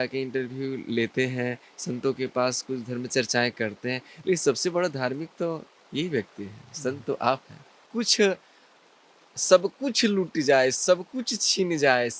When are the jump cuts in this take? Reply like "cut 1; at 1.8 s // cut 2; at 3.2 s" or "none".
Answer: cut 1; at 7.8 s